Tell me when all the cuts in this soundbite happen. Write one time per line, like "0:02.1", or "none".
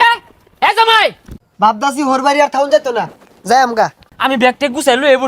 0:01.3
0:04.0